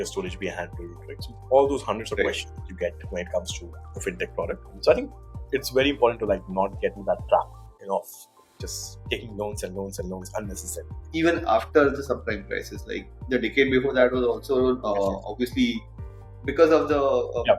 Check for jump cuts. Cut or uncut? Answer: cut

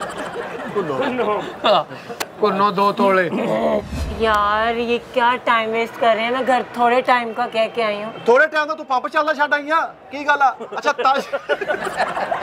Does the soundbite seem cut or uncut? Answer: cut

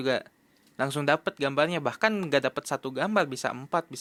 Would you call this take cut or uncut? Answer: uncut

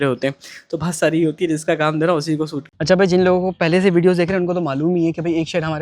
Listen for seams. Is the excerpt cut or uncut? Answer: cut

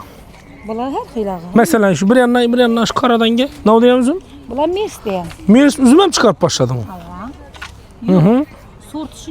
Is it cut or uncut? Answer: cut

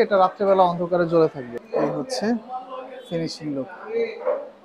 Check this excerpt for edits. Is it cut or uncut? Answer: cut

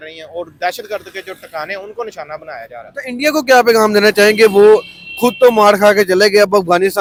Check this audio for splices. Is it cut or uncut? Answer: uncut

